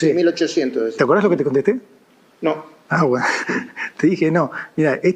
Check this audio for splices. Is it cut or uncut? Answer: uncut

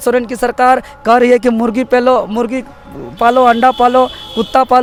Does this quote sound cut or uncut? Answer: uncut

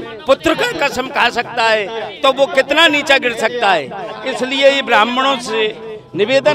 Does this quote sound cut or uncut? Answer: uncut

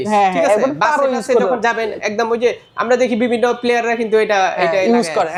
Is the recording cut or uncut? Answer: uncut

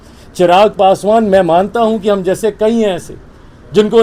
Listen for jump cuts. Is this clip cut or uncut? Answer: uncut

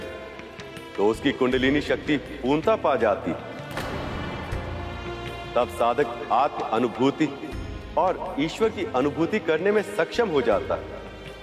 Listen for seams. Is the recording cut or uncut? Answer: uncut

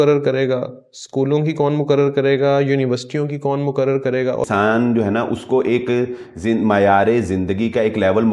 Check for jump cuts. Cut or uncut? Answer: cut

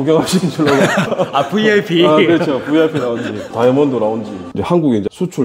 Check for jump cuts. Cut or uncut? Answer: cut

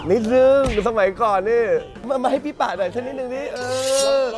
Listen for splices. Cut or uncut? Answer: cut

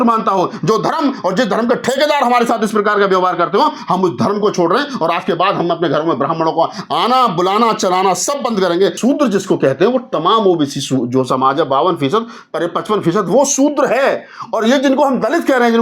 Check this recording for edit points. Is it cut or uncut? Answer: cut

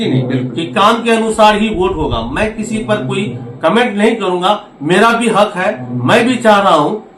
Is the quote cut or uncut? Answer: uncut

